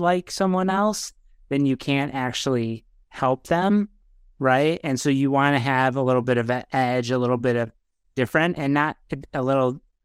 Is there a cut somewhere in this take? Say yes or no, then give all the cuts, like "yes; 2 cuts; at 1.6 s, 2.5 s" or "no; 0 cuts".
no; 0 cuts